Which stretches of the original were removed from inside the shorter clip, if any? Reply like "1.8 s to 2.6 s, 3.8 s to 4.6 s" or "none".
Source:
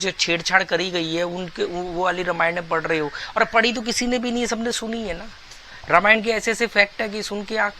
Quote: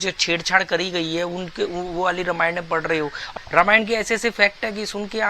3.2 s to 5.6 s